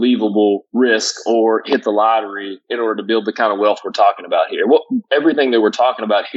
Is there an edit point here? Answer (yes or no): no